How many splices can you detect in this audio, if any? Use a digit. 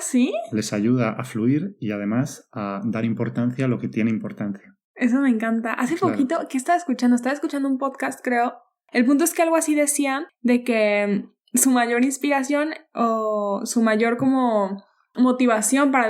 1